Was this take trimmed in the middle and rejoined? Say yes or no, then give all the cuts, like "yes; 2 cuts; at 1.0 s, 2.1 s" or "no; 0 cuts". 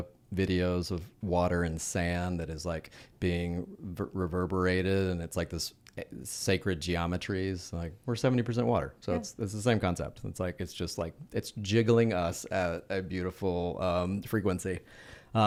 no; 0 cuts